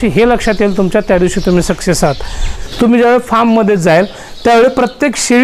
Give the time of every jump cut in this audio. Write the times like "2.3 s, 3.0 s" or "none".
2.6 s

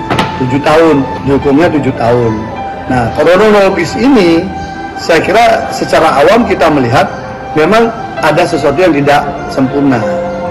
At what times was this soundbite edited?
1.1 s

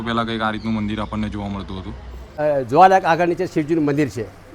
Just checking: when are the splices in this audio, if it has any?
2.3 s

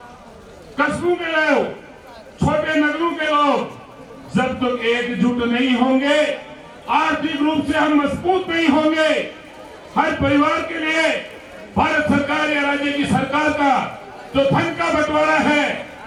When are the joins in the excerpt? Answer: none

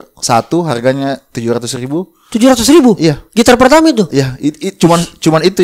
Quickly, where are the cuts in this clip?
none

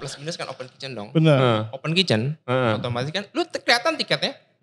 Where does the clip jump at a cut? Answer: none

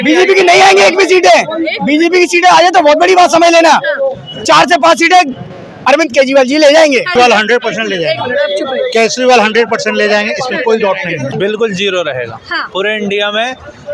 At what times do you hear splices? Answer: 7.1 s, 11.3 s

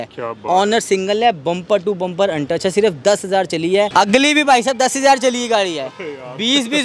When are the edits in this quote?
3.9 s

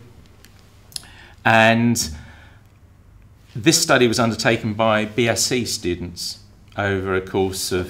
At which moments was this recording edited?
none

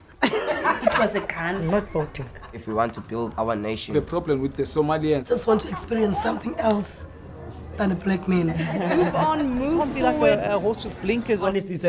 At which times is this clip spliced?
none

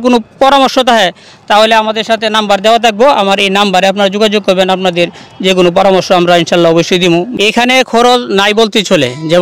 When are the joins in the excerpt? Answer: 7.3 s

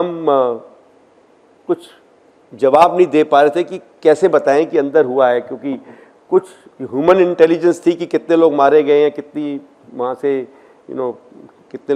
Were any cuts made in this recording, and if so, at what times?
none

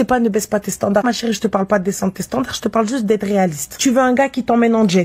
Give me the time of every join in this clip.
3.7 s

